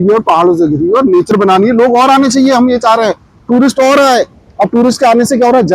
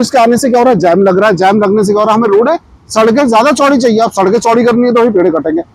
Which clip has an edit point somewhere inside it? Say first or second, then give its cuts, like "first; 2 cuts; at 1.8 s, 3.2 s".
first; 1 cut; at 1.3 s